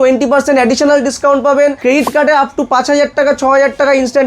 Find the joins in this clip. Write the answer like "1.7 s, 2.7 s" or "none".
1.8 s